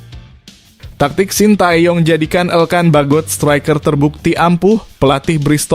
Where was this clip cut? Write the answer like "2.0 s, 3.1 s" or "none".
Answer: 0.9 s

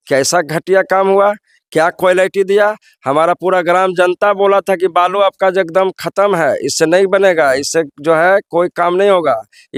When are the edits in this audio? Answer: none

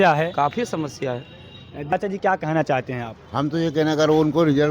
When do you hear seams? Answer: 1.8 s

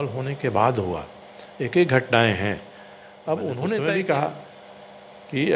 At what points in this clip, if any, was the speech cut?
3.8 s

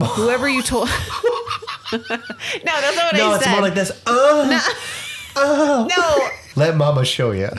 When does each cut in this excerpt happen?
6.4 s

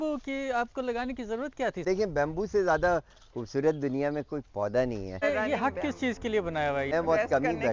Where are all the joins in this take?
1.8 s, 5.2 s, 6.9 s

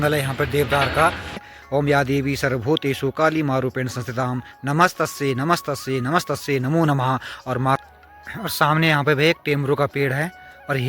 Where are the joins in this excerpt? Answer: 1.4 s, 7.8 s

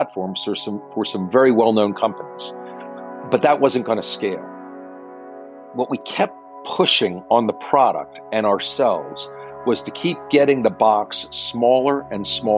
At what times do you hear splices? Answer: none

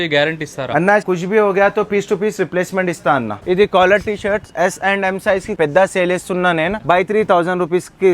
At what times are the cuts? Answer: 1.1 s, 3.3 s, 5.5 s, 6.8 s

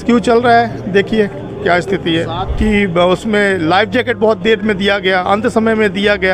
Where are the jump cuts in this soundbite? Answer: 2.4 s

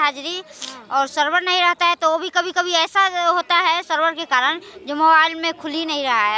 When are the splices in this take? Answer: none

